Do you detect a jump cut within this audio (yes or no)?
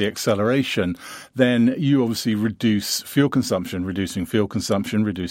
no